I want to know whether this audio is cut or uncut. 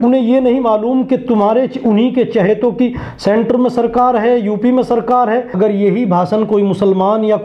cut